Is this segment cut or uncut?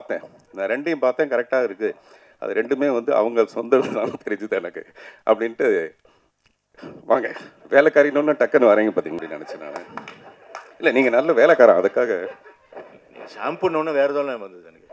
cut